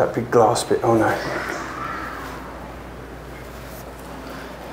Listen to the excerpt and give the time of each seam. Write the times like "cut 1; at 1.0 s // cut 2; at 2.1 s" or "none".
none

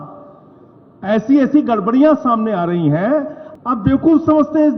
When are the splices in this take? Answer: cut 1; at 3.4 s

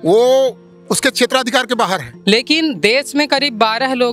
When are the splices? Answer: cut 1; at 2.1 s

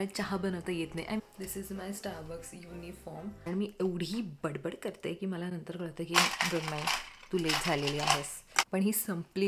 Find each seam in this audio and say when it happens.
cut 1; at 1.2 s // cut 2; at 3.5 s // cut 3; at 8.7 s

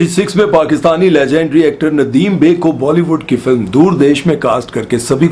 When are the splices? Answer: none

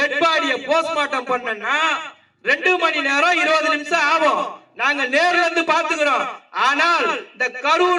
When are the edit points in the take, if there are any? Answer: none

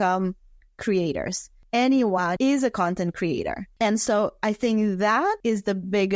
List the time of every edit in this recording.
cut 1; at 1.5 s // cut 2; at 2.3 s // cut 3; at 5.4 s

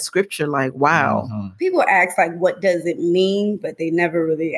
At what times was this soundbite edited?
cut 1; at 1.4 s

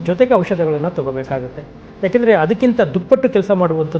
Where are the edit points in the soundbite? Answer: none

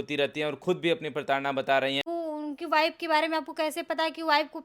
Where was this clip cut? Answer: cut 1; at 2.1 s

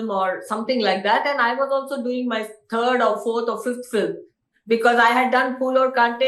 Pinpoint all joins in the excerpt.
none

